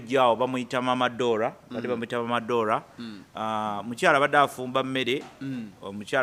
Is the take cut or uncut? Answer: uncut